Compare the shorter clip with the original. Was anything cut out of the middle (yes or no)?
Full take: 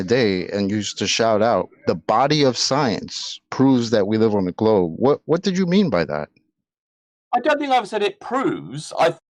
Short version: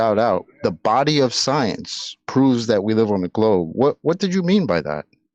no